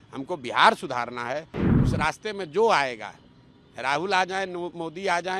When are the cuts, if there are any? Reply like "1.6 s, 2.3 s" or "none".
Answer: 1.6 s